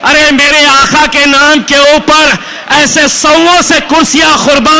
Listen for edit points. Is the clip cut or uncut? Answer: uncut